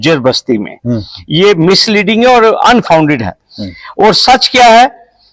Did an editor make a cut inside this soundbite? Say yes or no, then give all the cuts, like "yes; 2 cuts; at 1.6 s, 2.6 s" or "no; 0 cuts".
no; 0 cuts